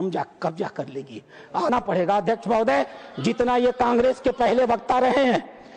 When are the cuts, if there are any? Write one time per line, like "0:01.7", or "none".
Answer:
0:01.7